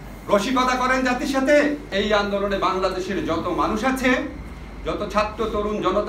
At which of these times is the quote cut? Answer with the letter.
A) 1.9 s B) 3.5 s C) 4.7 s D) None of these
A